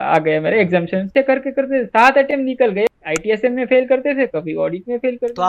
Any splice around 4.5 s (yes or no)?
no